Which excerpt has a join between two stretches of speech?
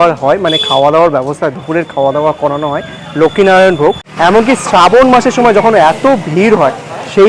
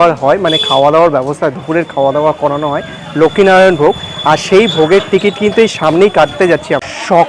first; 1 cut; at 4.1 s

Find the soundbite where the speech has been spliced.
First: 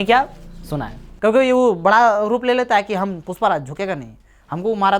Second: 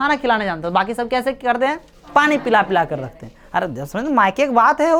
first; 1 cut; at 1.1 s

